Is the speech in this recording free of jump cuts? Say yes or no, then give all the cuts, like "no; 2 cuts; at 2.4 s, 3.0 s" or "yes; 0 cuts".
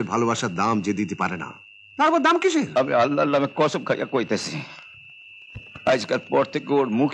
no; 1 cut; at 2.7 s